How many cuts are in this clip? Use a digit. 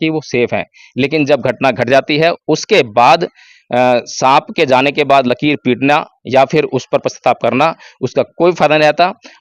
0